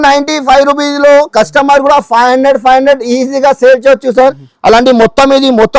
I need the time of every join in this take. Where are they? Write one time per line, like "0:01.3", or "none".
0:04.5